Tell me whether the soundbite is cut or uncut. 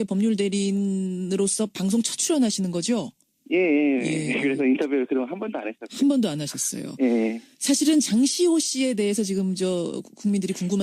cut